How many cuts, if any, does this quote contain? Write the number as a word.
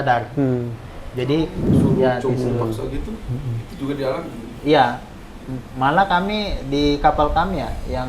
one